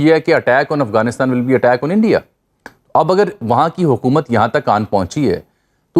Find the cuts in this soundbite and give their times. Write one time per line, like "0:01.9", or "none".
none